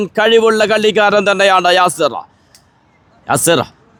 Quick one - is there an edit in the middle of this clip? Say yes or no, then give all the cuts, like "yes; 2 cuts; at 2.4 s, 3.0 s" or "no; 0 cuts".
no; 0 cuts